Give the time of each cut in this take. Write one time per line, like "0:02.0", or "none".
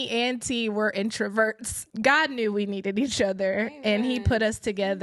0:01.8